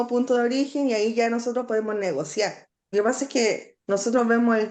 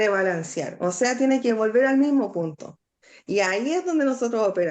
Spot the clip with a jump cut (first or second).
first